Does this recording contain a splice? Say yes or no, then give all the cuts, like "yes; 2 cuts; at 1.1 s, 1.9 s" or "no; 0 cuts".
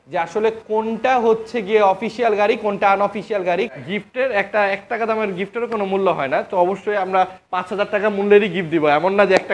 yes; 1 cut; at 3.7 s